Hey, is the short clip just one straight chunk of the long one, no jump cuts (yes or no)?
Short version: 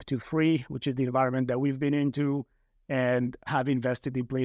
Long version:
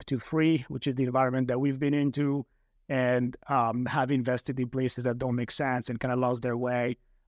no